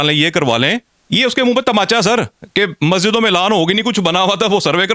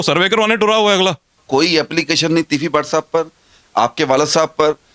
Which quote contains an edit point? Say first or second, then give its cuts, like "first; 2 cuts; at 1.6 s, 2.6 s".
second; 1 cut; at 1.4 s